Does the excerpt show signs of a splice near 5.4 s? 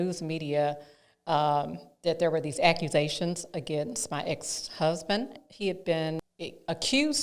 yes; 2 cuts; at 5.4 s, 6.2 s

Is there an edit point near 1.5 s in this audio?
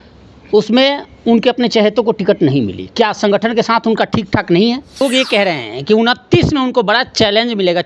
no; 1 cut; at 5.0 s

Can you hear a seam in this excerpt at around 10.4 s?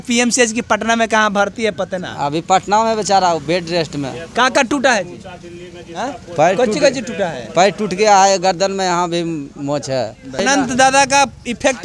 yes; 1 cut; at 10.4 s

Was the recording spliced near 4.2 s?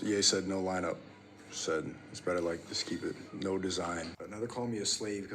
yes; 1 cut; at 4.2 s

